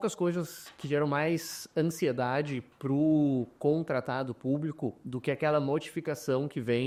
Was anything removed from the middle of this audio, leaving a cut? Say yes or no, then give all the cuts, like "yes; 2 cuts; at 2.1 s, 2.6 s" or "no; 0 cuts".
no; 0 cuts